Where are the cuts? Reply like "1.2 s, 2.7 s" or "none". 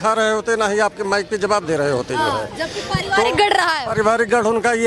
none